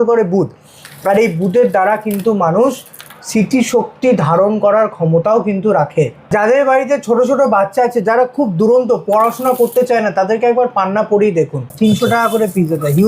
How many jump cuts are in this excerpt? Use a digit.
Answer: 1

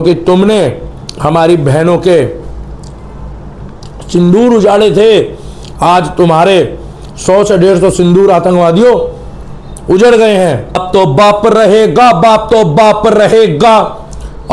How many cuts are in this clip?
1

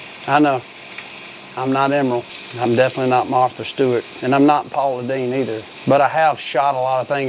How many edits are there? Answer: 3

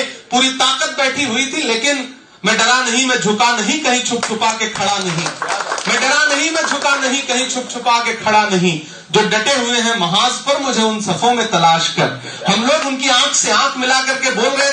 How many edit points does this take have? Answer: 0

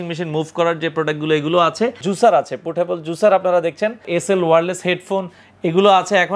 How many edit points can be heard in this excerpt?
2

